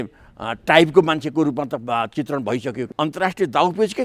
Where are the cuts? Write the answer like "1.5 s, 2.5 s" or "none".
2.8 s